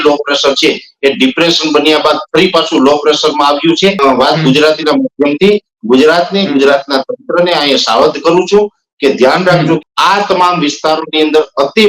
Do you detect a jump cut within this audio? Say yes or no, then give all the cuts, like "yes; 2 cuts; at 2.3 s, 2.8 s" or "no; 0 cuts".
yes; 2 cuts; at 4.0 s, 9.8 s